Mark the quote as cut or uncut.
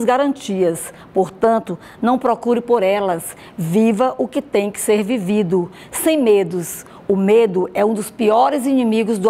uncut